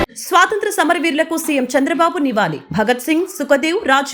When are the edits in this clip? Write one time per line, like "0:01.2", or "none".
none